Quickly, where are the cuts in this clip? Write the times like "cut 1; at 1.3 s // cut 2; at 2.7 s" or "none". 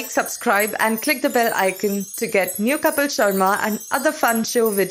none